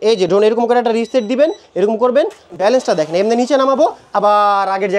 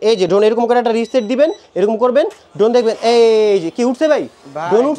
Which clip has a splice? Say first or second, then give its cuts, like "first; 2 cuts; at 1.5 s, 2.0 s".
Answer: first; 1 cut; at 2.5 s